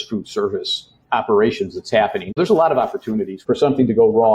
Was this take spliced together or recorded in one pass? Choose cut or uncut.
cut